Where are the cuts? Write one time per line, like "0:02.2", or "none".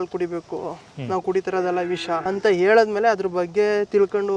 0:02.2